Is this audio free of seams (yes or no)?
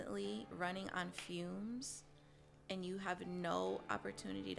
yes